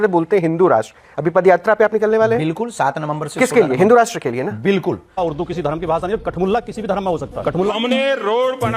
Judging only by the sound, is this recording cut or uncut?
cut